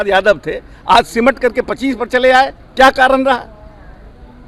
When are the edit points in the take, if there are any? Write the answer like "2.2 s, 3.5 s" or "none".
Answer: none